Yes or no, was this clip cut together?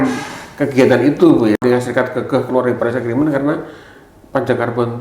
yes